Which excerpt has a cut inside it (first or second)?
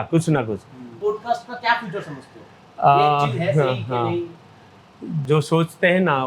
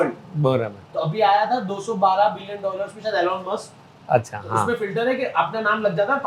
first